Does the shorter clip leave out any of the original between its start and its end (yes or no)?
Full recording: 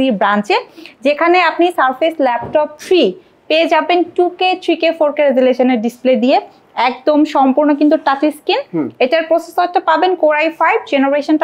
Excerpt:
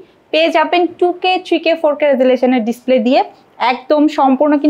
no